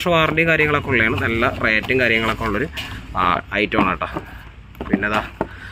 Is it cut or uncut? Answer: uncut